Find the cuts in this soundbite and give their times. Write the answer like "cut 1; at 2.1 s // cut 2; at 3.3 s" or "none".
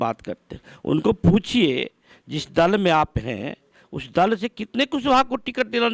none